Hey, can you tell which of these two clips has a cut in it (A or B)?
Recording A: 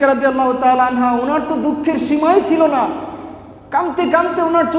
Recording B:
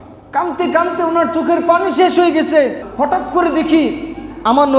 B